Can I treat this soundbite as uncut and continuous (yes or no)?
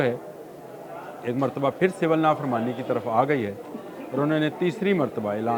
yes